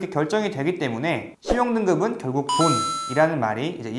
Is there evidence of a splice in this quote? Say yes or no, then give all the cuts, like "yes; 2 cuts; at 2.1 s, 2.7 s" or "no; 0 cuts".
no; 0 cuts